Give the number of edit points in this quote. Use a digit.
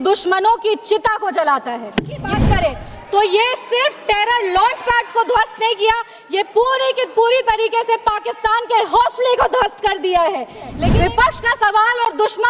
2